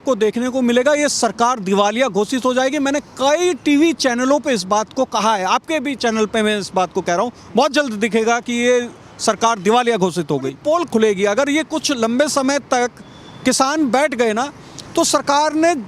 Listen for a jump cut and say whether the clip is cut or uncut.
cut